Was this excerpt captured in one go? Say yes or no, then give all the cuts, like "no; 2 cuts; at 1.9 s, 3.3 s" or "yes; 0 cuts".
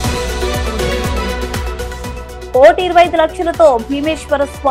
no; 1 cut; at 2.0 s